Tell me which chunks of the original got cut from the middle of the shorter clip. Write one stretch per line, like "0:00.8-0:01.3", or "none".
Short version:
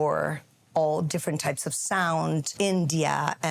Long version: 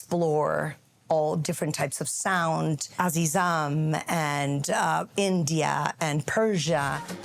0:02.9-0:05.1